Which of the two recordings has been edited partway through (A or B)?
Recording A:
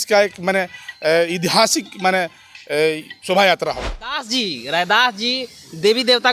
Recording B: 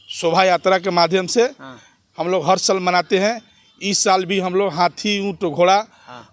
A